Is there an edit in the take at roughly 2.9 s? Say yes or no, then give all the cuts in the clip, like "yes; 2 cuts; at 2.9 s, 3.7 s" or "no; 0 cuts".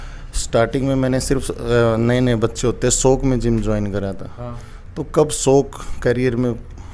no; 0 cuts